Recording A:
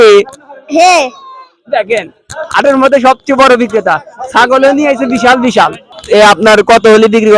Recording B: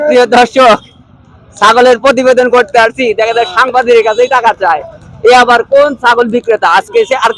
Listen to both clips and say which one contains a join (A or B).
A